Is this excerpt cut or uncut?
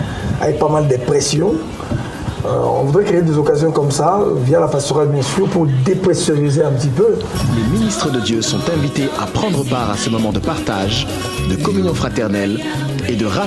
uncut